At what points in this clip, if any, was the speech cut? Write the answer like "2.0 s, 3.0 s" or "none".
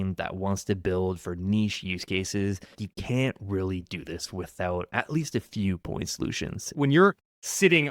2.9 s, 6.7 s

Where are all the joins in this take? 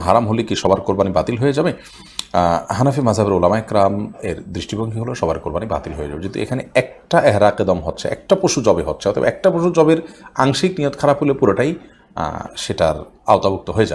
none

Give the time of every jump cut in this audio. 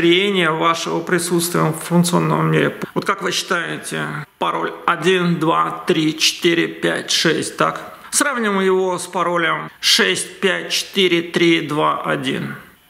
none

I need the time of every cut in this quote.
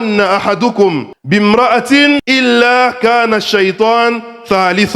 1.1 s, 2.2 s

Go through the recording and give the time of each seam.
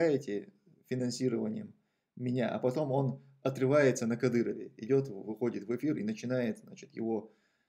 none

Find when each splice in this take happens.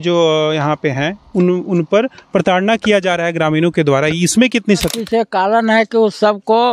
4.9 s

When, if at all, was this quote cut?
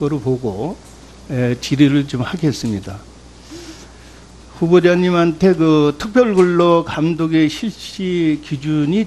6.2 s

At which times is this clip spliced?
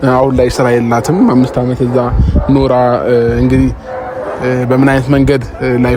none

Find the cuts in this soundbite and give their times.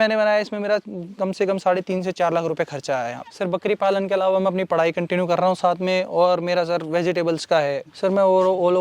3.2 s, 7.9 s

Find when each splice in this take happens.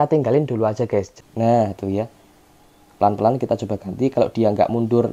1.1 s

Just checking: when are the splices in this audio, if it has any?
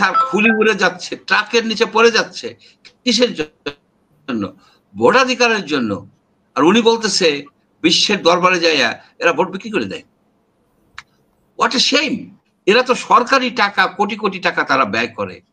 12.5 s

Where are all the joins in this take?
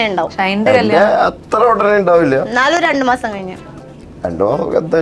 none

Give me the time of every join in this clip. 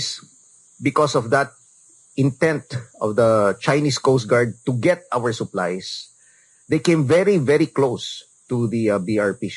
none

